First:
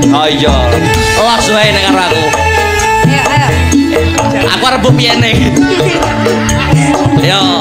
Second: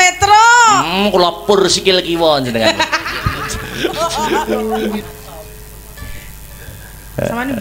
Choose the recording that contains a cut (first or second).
second